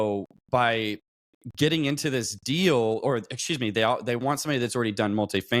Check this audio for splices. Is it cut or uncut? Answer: uncut